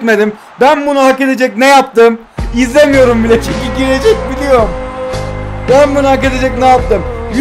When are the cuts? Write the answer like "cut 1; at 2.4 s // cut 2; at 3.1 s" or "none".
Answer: none